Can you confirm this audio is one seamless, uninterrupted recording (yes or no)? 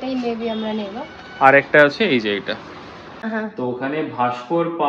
no